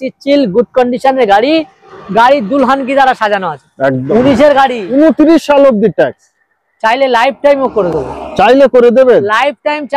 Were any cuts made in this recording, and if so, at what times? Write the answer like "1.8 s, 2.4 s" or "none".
4.0 s